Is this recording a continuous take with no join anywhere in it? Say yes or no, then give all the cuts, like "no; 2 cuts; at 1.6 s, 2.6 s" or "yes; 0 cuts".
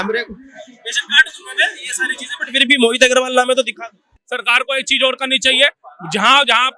no; 1 cut; at 4.0 s